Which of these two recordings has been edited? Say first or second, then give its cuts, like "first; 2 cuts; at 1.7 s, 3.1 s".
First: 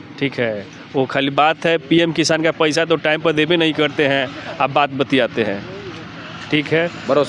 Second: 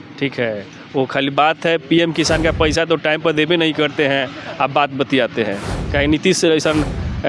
second; 1 cut; at 5.7 s